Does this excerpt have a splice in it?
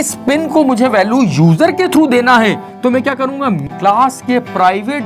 yes; 1 cut; at 3.6 s

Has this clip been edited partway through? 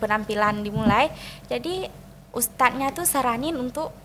no; 0 cuts

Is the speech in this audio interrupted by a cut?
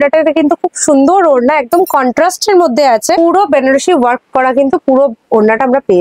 no; 0 cuts

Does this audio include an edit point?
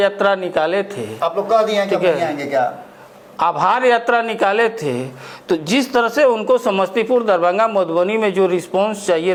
no; 0 cuts

